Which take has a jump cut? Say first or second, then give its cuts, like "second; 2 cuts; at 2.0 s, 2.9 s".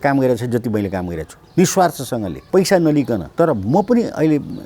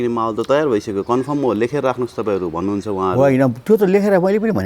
first; 2 cuts; at 2.3 s, 3.3 s